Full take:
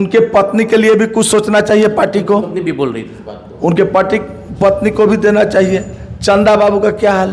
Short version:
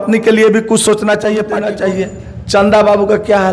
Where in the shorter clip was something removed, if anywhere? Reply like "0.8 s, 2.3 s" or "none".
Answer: 1.7 s